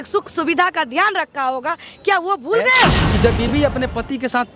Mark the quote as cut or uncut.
cut